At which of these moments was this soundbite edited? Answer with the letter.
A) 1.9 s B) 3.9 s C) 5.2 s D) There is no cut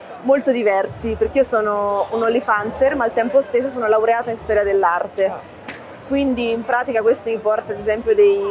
D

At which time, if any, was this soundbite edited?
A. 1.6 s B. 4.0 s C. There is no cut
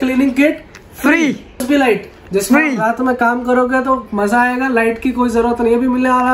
A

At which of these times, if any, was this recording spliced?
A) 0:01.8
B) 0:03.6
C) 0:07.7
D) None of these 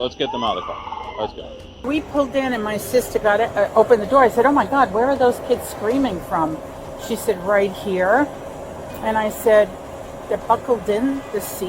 A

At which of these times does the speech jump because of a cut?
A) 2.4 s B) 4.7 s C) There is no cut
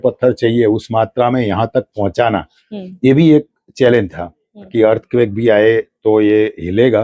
B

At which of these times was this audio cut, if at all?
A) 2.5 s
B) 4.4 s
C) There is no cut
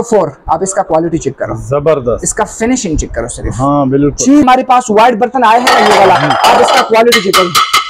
B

